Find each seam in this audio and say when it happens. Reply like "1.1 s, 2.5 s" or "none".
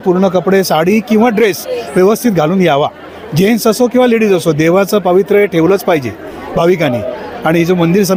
none